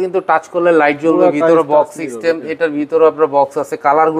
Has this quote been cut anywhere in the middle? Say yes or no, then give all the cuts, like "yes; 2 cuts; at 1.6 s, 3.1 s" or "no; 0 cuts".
no; 0 cuts